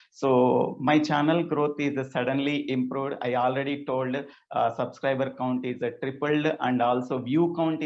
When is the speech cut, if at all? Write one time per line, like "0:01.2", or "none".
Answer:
none